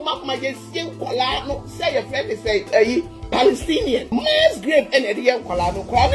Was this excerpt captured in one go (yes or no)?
no